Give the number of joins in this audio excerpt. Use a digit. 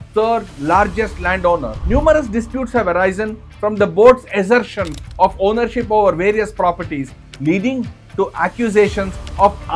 1